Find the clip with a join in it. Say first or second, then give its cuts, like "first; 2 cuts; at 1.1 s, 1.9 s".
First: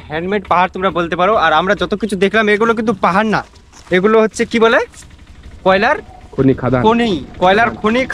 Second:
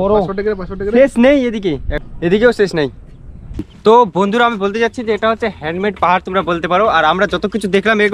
second; 1 cut; at 3.7 s